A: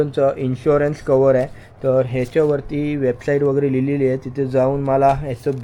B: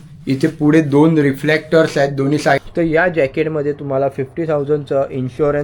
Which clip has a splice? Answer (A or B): B